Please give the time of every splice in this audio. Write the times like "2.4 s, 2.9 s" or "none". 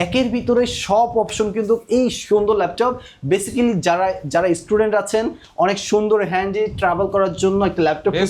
none